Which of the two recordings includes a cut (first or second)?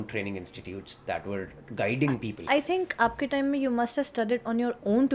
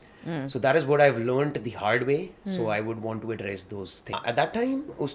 second